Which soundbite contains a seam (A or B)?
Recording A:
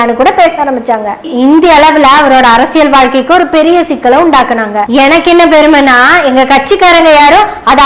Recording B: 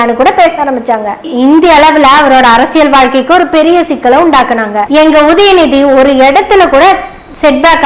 B